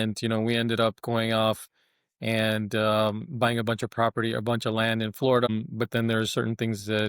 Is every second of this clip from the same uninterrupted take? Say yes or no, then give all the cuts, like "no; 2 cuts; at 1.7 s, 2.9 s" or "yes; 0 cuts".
no; 1 cut; at 5.5 s